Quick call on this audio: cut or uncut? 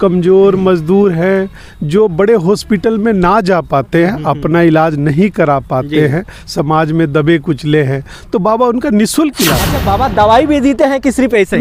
cut